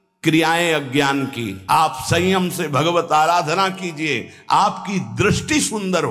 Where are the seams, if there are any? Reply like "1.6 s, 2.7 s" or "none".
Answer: 1.5 s